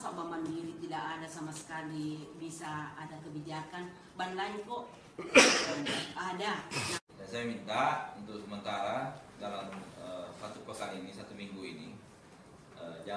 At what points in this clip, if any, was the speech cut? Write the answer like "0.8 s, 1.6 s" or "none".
7.0 s